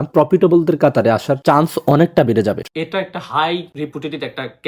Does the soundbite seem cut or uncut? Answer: cut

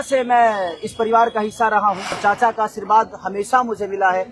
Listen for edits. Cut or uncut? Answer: cut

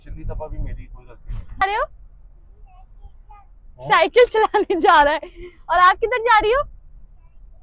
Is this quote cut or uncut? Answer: cut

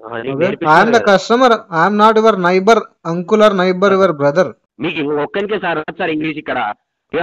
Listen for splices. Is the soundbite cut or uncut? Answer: cut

